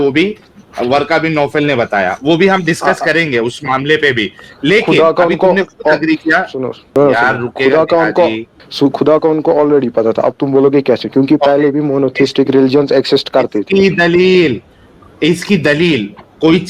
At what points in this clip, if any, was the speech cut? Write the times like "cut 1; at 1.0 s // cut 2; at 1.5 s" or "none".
none